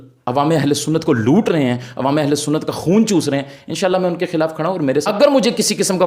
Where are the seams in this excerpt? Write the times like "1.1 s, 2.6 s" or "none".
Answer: 5.1 s